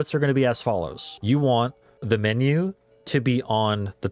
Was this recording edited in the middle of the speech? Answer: yes; 2 cuts; at 1.1 s, 1.9 s

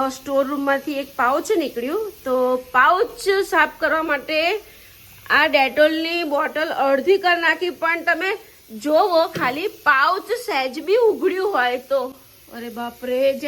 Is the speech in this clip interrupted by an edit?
no; 0 cuts

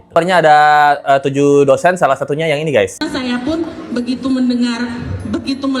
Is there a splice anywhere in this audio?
no; 0 cuts

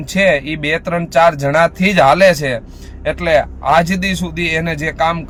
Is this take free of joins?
yes; 0 cuts

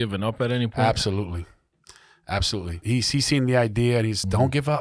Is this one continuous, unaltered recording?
no; 1 cut; at 2.8 s

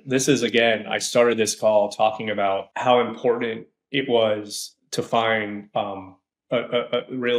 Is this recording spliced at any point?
yes; 1 cut; at 2.7 s

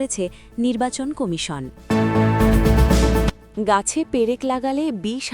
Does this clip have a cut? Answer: yes; 2 cuts; at 1.7 s, 3.4 s

